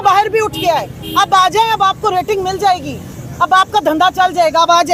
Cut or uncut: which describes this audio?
uncut